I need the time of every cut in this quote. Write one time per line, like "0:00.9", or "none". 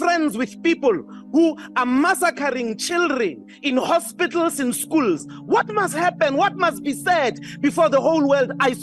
none

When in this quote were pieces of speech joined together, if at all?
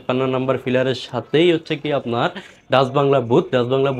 none

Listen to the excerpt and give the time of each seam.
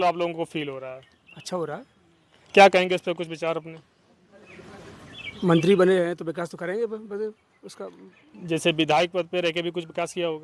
none

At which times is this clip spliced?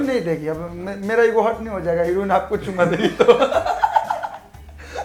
none

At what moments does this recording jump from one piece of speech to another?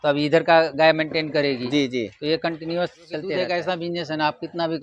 0:03.3

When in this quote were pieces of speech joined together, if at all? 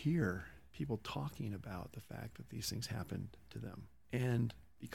none

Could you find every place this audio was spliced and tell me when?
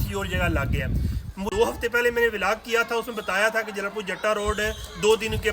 0:01.5

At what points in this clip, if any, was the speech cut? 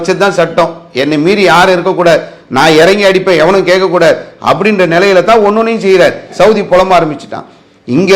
0:06.3

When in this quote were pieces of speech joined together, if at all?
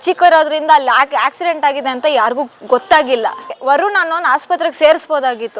0:03.5

